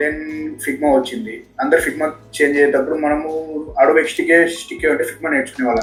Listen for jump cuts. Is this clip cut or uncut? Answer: uncut